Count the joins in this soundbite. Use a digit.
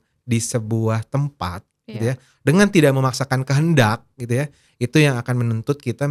0